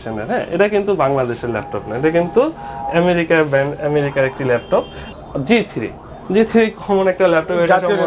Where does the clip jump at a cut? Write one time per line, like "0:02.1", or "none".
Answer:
0:05.0